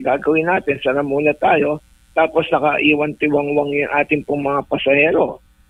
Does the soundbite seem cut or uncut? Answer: uncut